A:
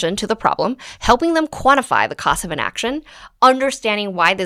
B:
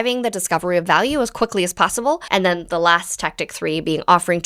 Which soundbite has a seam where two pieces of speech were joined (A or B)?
B